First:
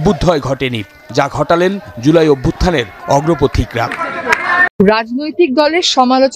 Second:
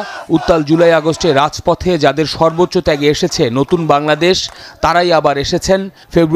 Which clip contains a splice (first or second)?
first